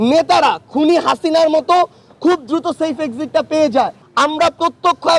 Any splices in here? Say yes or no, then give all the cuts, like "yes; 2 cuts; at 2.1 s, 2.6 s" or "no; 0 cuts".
yes; 1 cut; at 4.0 s